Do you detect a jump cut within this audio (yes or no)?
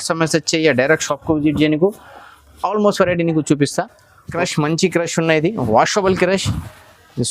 yes